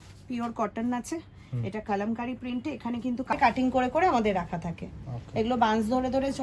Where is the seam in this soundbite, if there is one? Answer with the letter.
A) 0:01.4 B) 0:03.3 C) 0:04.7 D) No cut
B